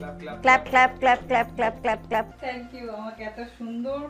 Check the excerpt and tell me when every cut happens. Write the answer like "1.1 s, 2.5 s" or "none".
2.3 s